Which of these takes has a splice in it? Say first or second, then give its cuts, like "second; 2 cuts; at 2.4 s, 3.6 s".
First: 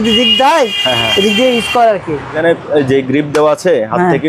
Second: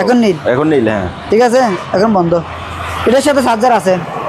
first; 1 cut; at 2.4 s